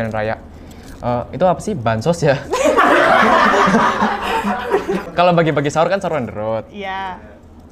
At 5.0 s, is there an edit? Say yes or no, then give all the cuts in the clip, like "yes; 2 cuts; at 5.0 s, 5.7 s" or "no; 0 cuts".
yes; 1 cut; at 5.0 s